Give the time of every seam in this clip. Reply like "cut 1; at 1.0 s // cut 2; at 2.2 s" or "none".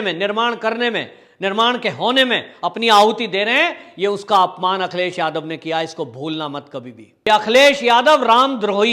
cut 1; at 7.1 s